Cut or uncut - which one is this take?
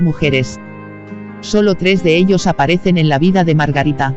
cut